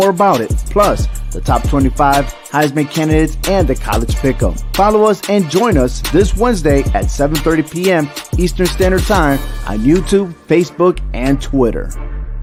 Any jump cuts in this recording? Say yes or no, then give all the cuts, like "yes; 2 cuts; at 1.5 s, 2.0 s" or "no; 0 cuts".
no; 0 cuts